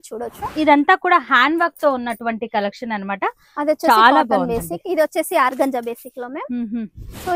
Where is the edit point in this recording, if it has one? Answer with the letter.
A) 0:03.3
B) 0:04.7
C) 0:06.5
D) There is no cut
D